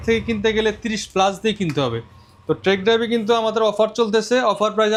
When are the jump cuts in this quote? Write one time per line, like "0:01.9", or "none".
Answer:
none

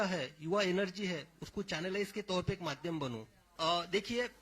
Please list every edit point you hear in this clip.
0:03.5

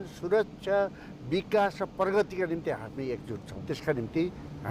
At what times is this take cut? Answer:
0:03.5

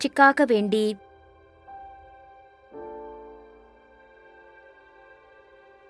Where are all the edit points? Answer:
0:01.0

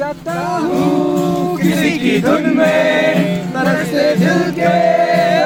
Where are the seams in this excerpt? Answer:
none

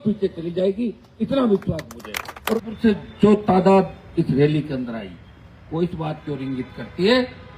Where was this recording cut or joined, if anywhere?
0:02.4

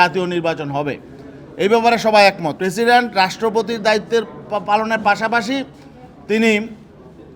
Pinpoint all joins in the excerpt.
0:02.5

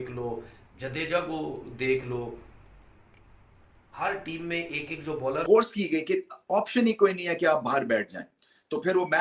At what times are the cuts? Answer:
0:05.4

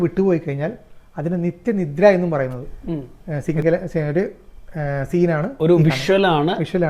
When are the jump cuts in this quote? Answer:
0:03.1

